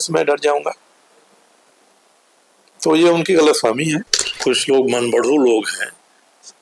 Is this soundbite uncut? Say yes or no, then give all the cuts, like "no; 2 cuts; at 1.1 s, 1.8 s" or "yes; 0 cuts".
no; 1 cut; at 4.2 s